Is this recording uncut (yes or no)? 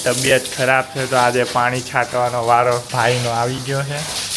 no